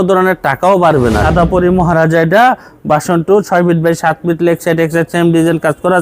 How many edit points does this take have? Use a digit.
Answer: 1